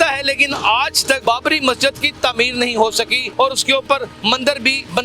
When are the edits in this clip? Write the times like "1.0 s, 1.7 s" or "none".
1.2 s, 3.2 s, 4.3 s